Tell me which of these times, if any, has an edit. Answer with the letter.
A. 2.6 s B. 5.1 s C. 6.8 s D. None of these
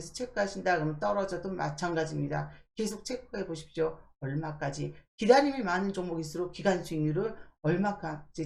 D